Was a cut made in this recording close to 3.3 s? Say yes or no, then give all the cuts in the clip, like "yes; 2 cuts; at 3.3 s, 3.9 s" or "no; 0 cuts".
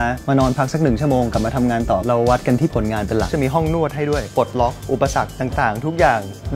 yes; 2 cuts; at 3.3 s, 4.3 s